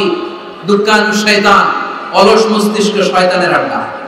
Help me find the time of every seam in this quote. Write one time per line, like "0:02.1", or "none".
none